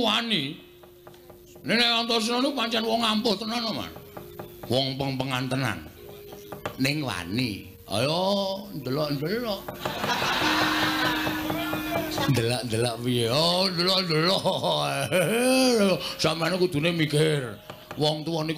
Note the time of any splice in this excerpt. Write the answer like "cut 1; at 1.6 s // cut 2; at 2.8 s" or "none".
cut 1; at 5.8 s

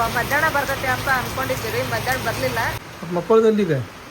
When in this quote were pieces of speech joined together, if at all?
cut 1; at 2.9 s

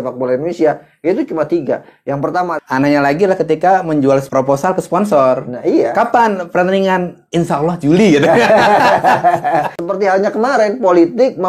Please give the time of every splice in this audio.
cut 1; at 2.5 s // cut 2; at 4.3 s // cut 3; at 9.7 s

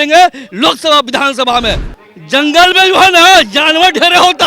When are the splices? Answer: cut 1; at 1.9 s

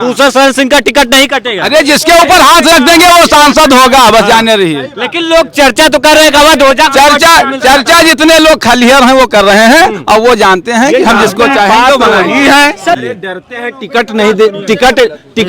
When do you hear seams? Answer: cut 1; at 13.0 s

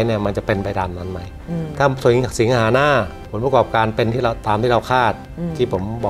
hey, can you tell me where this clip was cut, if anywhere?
cut 1; at 3.2 s

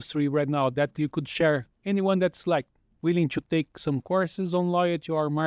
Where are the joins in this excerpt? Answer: cut 1; at 1.7 s

